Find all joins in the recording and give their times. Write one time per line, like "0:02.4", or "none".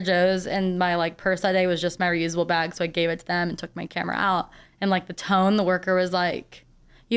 0:04.6